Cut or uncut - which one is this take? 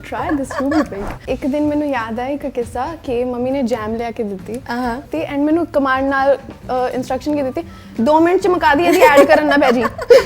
cut